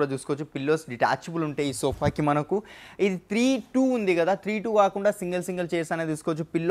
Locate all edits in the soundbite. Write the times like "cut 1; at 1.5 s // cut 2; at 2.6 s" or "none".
none